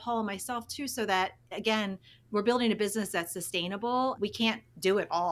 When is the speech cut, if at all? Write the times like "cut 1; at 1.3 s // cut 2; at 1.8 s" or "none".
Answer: cut 1; at 4.2 s